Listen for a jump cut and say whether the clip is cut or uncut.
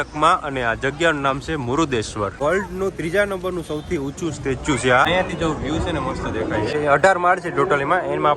cut